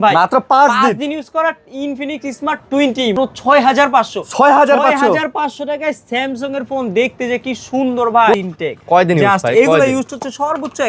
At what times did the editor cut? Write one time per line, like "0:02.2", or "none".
0:03.2
0:08.3